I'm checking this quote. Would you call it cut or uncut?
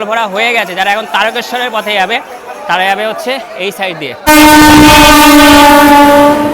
cut